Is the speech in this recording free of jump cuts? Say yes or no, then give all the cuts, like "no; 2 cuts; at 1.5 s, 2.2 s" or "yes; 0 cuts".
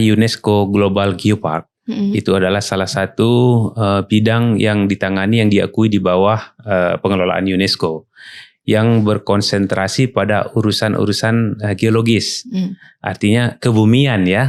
yes; 0 cuts